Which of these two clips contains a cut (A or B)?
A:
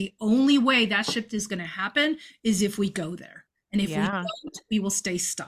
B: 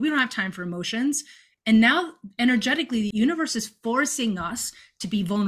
B